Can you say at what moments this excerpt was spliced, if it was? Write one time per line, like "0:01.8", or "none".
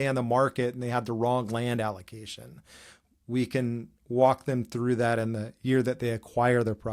none